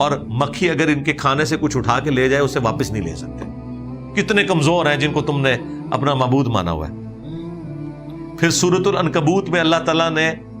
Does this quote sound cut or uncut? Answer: uncut